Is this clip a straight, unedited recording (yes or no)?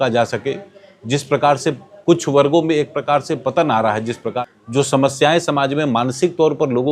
no